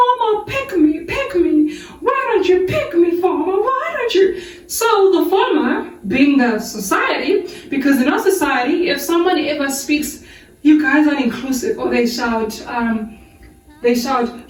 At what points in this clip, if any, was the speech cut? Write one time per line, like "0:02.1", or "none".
none